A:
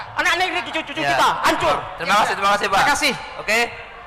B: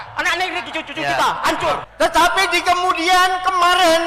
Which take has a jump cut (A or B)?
B